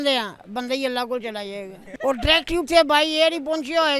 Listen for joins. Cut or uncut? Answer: cut